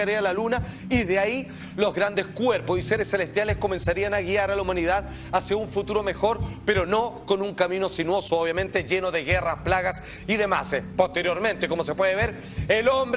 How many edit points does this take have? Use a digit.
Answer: 1